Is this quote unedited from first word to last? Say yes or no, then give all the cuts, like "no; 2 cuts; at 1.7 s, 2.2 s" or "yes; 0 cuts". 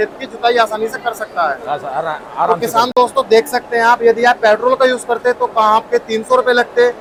yes; 0 cuts